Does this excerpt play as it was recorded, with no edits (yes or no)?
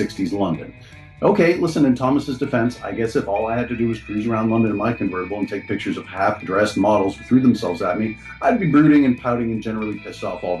yes